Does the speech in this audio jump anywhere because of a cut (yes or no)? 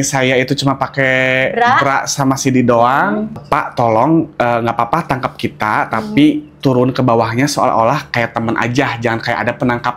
yes